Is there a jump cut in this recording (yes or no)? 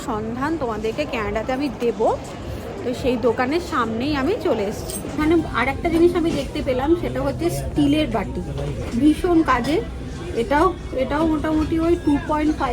yes